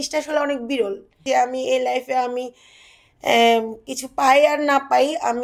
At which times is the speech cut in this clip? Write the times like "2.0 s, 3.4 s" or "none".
1.1 s